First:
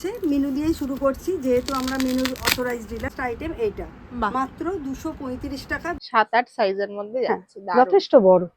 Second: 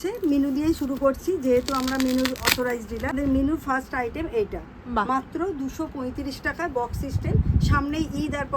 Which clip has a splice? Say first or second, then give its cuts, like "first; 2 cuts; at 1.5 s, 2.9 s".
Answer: first; 2 cuts; at 3.1 s, 5.9 s